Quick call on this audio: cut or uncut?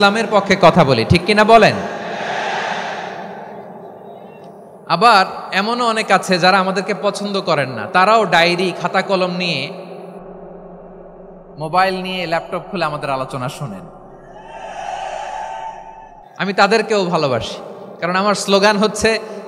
cut